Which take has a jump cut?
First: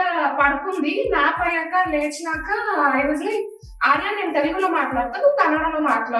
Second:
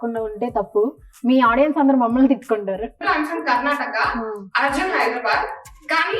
second; 1 cut; at 3.0 s

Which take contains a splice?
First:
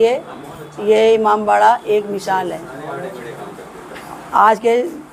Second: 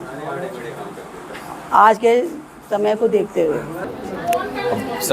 second; 1 cut; at 3.8 s

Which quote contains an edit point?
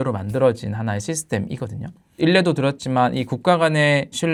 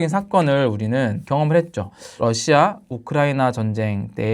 second; 2 cuts; at 1.2 s, 2.0 s

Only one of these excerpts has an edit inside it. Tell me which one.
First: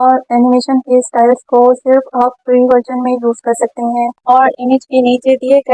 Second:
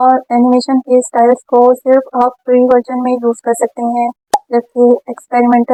first; 1 cut; at 4.2 s

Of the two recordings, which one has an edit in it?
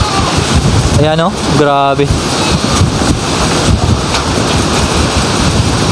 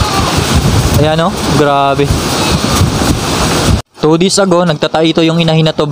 second; 1 cut; at 3.8 s

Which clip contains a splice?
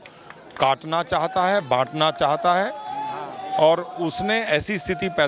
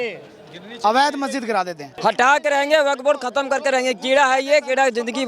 second; 1 cut; at 1.8 s

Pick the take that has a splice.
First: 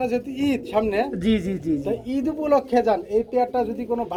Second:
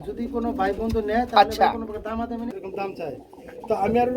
second; 1 cut; at 2.5 s

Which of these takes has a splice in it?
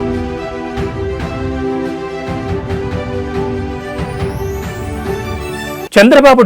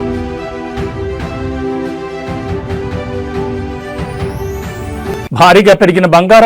second; 1 cut; at 5.2 s

